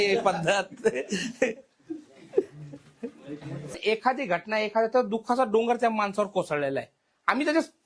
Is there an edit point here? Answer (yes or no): yes